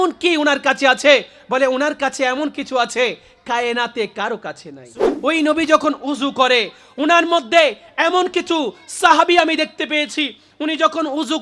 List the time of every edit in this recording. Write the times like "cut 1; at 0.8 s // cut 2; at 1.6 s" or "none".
cut 1; at 5.0 s